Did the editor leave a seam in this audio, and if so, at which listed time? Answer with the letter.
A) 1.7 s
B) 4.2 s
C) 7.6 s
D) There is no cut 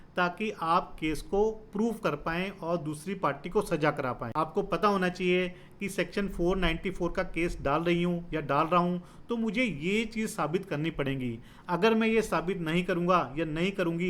B